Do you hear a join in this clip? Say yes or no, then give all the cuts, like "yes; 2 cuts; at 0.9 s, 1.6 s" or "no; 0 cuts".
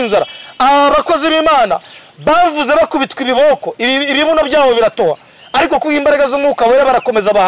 no; 0 cuts